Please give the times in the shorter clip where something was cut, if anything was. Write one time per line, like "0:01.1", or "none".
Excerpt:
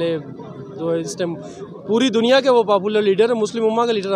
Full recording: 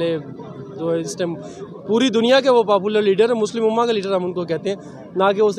none